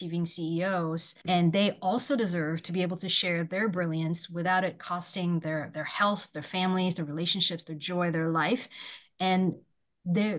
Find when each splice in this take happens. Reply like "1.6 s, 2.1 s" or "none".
1.1 s